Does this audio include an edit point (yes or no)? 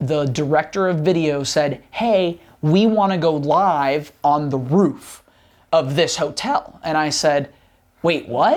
no